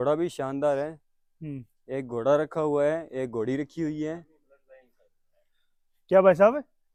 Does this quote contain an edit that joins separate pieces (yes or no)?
no